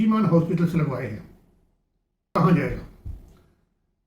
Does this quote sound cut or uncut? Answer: cut